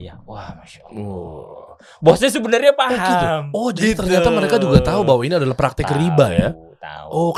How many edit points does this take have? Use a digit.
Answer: 0